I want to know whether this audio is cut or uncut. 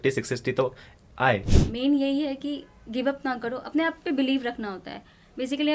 cut